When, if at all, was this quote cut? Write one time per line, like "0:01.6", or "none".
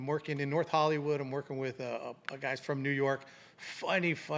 none